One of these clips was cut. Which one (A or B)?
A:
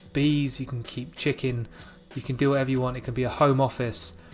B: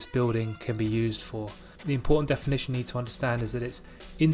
B